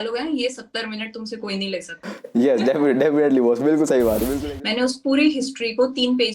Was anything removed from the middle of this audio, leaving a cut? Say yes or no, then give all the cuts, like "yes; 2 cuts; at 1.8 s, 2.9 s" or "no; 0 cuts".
yes; 2 cuts; at 2.0 s, 4.3 s